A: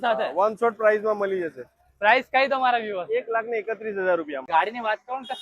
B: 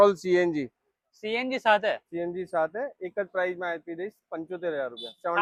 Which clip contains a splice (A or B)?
A